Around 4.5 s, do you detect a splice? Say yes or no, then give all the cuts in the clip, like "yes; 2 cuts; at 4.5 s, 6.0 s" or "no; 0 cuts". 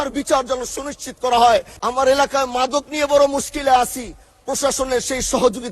no; 1 cut; at 2.0 s